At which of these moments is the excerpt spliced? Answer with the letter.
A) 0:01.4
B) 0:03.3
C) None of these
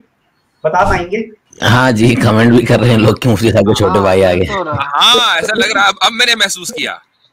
A